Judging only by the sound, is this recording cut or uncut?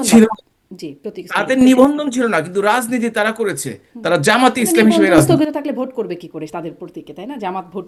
uncut